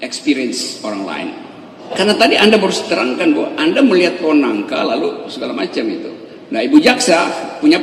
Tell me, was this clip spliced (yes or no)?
yes